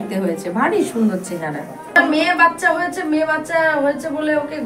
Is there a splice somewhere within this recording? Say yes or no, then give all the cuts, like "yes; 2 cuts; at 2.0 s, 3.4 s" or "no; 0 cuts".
yes; 1 cut; at 1.9 s